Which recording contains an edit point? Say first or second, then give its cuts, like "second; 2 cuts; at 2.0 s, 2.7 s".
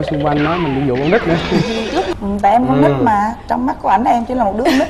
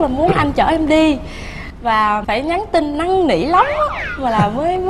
first; 1 cut; at 2.1 s